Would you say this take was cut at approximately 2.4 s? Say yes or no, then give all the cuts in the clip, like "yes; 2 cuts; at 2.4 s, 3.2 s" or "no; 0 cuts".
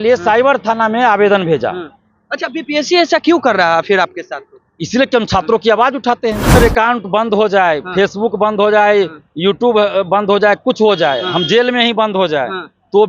no; 1 cut; at 6.6 s